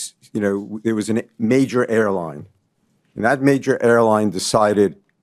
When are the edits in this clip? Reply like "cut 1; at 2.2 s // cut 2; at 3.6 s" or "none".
none